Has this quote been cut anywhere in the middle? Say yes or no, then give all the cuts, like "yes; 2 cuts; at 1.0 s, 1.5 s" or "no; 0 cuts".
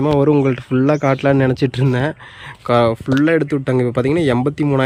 no; 0 cuts